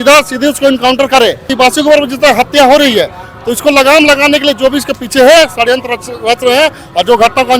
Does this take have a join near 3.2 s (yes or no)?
no